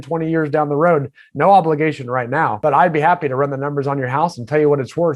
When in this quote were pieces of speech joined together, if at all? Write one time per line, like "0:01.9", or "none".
0:02.5